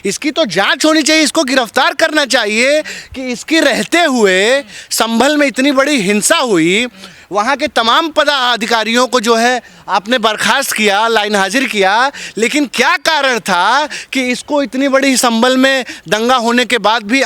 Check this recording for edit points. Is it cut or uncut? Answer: uncut